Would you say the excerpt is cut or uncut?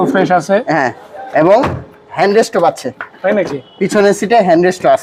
uncut